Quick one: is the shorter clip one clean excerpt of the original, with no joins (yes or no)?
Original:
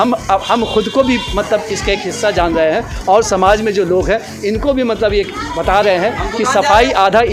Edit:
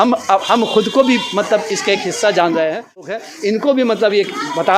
no